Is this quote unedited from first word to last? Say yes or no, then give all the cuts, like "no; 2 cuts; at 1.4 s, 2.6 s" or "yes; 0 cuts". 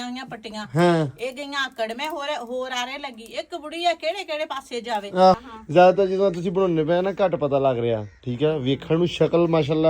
no; 1 cut; at 5.4 s